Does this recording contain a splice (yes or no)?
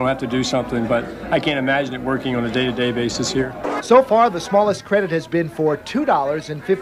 no